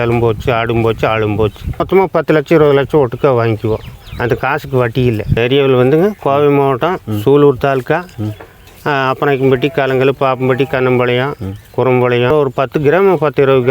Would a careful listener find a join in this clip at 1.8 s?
yes; 3 cuts; at 1.8 s, 5.4 s, 12.3 s

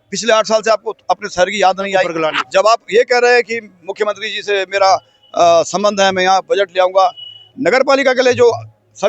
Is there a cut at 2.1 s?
yes; 1 cut; at 2.1 s

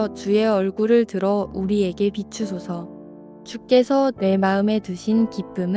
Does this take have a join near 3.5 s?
yes; 1 cut; at 3.5 s

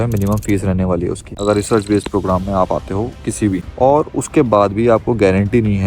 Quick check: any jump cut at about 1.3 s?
yes; 2 cuts; at 1.3 s, 3.7 s

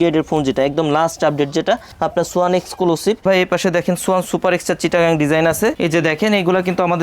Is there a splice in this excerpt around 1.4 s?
no; 2 cuts; at 3.2 s, 5.8 s

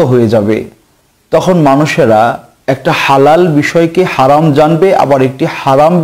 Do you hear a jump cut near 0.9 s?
no; 1 cut; at 2.5 s

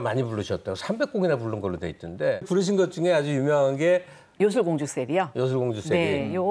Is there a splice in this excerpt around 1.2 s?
no; 1 cut; at 2.4 s

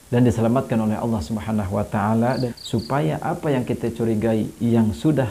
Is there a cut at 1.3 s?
no; 1 cut; at 2.5 s

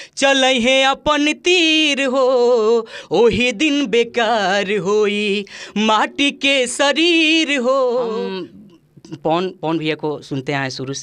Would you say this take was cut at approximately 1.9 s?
no; 1 cut; at 8.2 s

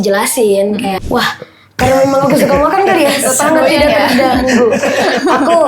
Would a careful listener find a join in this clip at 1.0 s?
yes; 1 cut; at 1.0 s

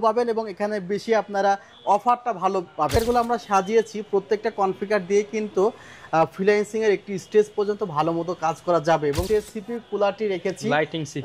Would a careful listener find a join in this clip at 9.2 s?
yes; 2 cuts; at 3.0 s, 9.2 s

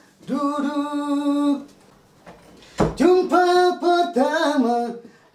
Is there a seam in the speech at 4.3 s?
no; 1 cut; at 1.8 s

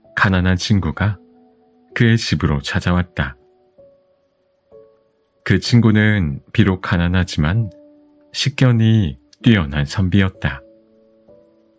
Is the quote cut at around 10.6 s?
yes; 1 cut; at 10.6 s

